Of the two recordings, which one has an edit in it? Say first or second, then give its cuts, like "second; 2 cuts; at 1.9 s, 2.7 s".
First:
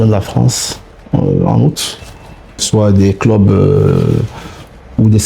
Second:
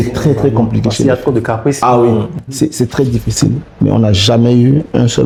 first; 1 cut; at 2.6 s